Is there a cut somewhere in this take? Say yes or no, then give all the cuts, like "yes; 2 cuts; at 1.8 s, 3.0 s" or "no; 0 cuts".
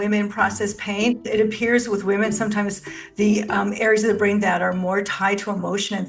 yes; 1 cut; at 1.3 s